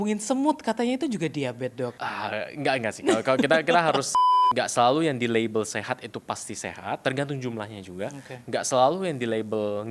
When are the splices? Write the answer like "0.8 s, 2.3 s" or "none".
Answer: 2.0 s, 4.1 s, 7.0 s